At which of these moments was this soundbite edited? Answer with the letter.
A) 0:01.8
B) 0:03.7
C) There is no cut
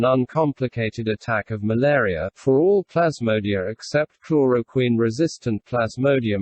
A